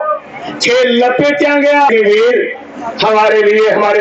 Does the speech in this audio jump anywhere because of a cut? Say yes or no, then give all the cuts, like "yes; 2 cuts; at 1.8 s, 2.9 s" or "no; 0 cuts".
yes; 1 cut; at 1.9 s